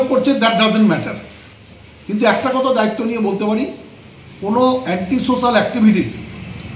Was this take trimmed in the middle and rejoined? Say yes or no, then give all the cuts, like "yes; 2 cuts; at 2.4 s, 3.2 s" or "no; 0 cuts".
no; 0 cuts